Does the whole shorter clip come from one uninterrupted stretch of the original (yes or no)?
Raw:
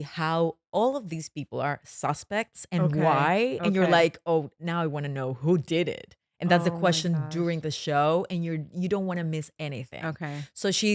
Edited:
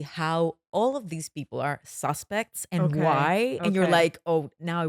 yes